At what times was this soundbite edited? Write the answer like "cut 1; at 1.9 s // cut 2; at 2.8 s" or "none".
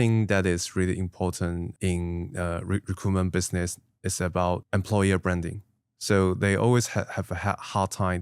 cut 1; at 1.7 s // cut 2; at 4.6 s